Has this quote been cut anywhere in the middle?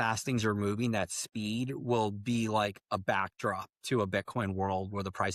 no; 0 cuts

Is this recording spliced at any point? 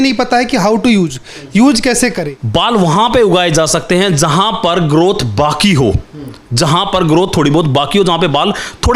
yes; 1 cut; at 2.2 s

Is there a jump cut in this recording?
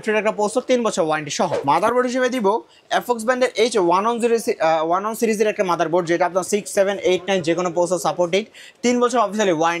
yes; 1 cut; at 1.6 s

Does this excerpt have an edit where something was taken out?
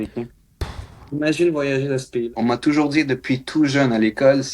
yes; 1 cut; at 2.2 s

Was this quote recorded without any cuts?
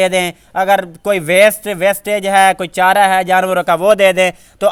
yes; 0 cuts

